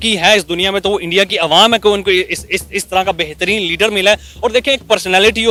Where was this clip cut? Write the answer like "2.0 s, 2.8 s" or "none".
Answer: none

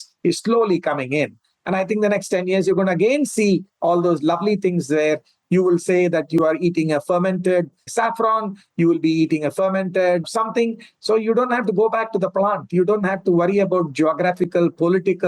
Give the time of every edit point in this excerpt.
7.9 s

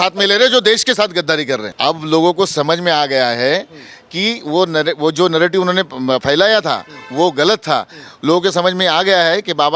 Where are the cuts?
1.7 s

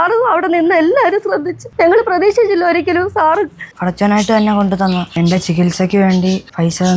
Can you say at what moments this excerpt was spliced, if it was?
3.7 s, 5.1 s

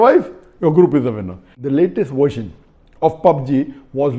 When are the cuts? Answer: 1.6 s

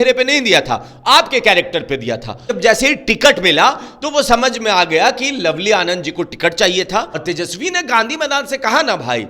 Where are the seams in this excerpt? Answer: 2.4 s, 7.2 s

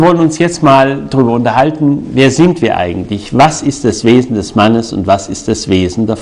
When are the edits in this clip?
none

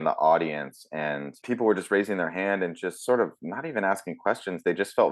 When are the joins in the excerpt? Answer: 1.4 s

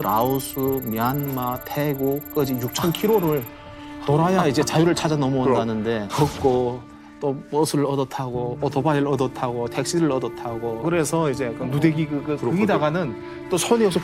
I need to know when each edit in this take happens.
6.1 s

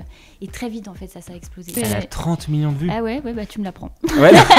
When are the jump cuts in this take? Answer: 1.8 s

